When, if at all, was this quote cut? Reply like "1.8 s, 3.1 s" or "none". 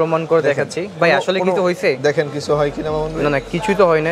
none

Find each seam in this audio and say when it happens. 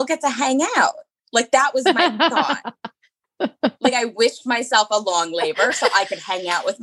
none

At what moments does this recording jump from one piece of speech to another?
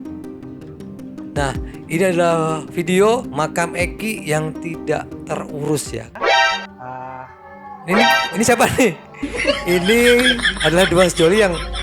6.1 s

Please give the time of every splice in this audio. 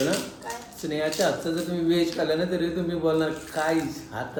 none

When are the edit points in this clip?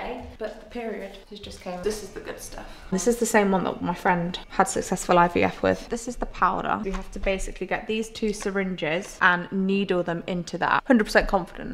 1.8 s, 2.9 s, 5.8 s, 10.8 s

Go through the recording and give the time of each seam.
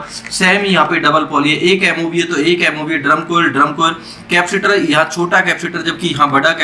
none

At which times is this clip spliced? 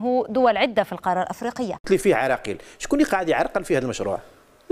1.8 s

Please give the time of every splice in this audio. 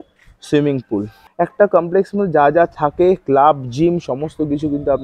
1.2 s

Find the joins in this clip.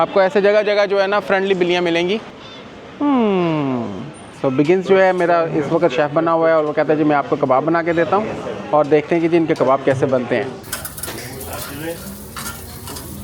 4.3 s, 10.6 s

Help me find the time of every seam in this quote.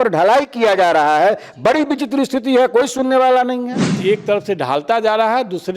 4.0 s

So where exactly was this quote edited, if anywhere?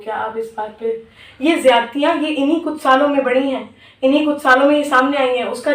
1.2 s

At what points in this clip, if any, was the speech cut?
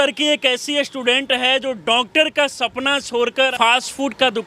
3.5 s

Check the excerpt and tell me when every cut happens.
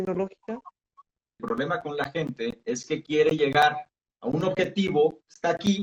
1.4 s

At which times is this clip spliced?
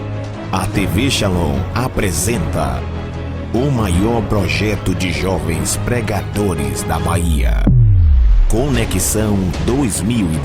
none

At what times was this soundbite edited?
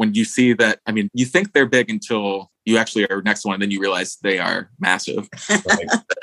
1.1 s

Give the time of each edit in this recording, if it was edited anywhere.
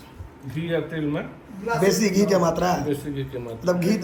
none

